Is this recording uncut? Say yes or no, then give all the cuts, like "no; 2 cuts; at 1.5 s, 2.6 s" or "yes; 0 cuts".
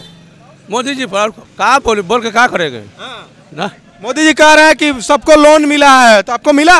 yes; 0 cuts